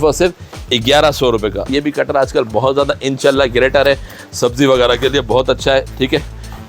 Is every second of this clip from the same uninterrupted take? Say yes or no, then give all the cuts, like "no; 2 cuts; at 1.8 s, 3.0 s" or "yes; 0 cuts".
yes; 0 cuts